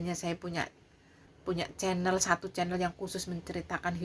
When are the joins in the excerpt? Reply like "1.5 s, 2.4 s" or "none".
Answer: 1.3 s